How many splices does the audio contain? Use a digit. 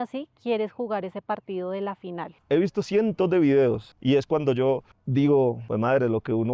4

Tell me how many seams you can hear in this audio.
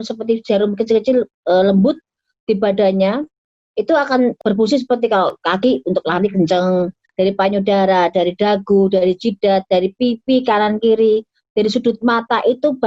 2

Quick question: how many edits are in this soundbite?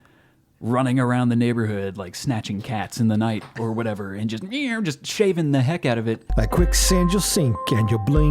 1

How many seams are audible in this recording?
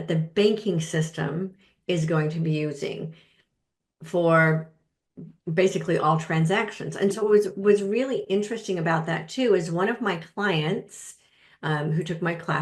0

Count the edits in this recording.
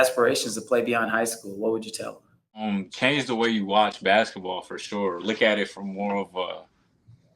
1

